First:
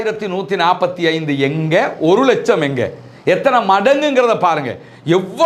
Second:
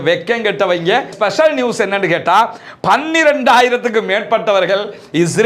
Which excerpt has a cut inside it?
second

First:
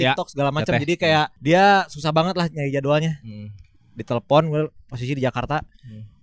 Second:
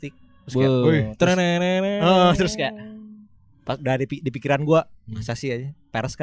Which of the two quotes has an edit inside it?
first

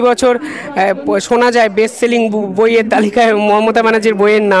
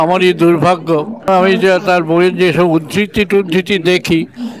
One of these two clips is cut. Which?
second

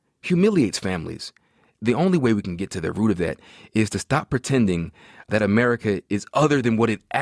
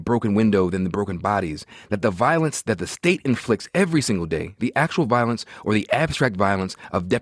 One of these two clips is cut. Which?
first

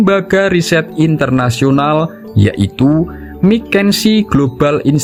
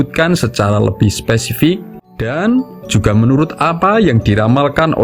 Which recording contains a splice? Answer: second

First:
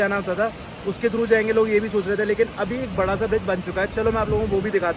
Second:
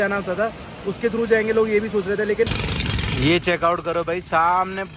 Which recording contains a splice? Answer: second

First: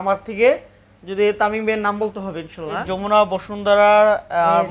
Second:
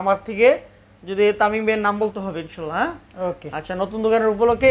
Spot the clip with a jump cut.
first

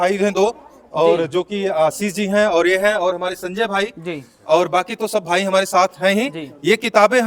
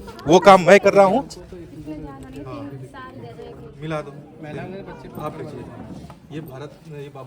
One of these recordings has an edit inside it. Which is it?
second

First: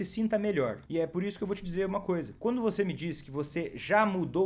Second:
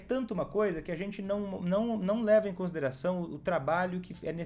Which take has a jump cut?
first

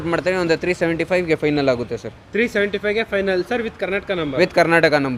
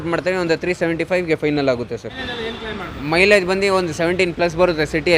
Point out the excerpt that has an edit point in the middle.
second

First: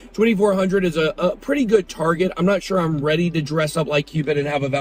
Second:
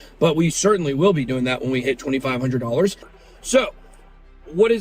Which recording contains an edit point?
second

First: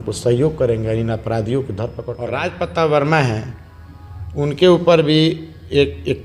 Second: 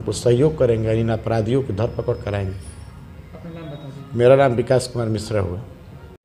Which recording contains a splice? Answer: first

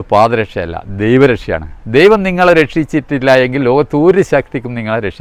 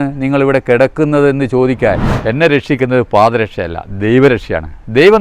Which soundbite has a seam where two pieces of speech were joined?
second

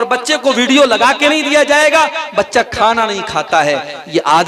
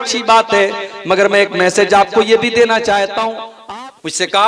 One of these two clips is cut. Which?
second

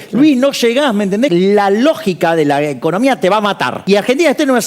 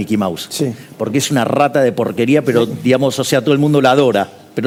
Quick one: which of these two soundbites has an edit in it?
first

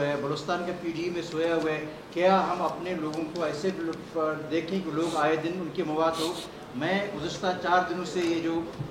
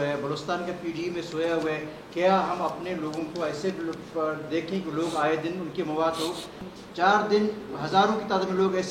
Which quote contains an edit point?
second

